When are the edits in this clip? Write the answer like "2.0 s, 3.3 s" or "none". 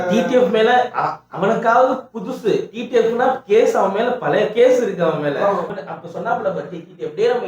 5.7 s